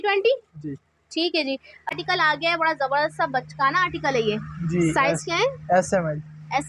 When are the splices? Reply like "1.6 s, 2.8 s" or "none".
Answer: 1.9 s